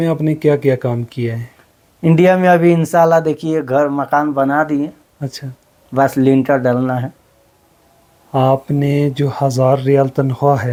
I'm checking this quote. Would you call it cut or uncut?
uncut